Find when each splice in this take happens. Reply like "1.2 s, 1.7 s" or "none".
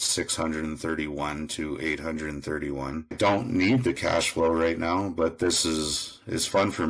3.2 s